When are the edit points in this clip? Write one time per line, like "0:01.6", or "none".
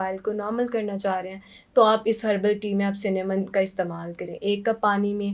none